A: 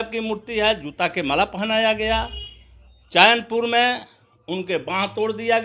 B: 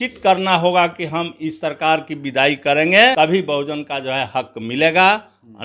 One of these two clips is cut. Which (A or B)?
B